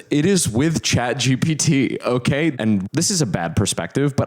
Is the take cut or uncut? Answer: cut